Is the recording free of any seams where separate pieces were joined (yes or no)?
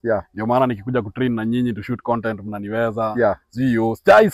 yes